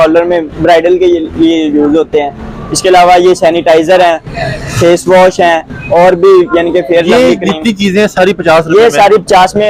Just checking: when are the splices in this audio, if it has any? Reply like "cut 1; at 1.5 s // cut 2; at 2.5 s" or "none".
none